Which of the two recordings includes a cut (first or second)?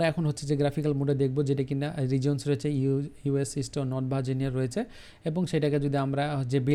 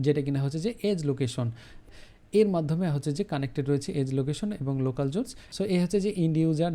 second